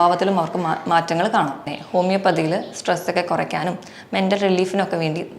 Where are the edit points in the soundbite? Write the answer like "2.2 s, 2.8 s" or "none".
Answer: 1.8 s